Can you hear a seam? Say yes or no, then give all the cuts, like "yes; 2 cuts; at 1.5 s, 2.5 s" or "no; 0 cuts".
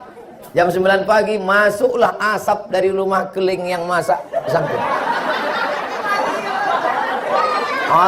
no; 0 cuts